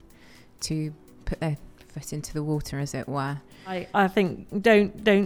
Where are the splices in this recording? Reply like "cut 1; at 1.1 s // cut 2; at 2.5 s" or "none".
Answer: cut 1; at 3.9 s